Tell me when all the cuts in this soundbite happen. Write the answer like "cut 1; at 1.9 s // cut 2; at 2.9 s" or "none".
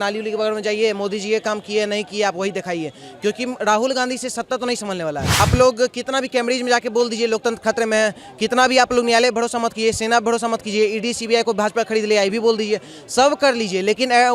cut 1; at 5.3 s